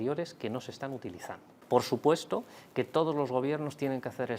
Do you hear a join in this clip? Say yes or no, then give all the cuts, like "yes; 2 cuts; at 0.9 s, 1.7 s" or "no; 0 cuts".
yes; 1 cut; at 1.5 s